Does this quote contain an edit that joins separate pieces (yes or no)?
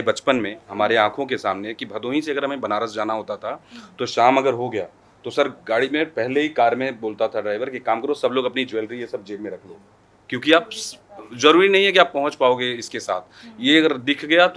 no